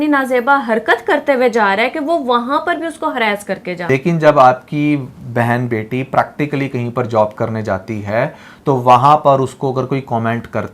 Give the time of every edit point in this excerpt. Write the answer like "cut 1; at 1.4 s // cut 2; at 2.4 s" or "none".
cut 1; at 3.9 s